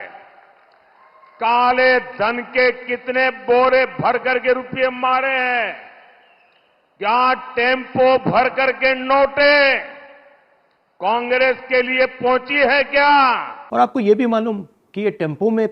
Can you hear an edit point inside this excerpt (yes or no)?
yes